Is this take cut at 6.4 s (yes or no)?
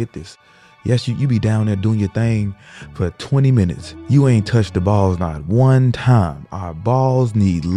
no